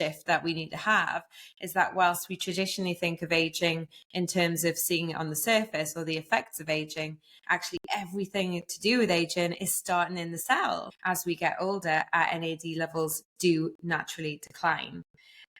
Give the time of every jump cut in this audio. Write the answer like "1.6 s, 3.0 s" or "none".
10.9 s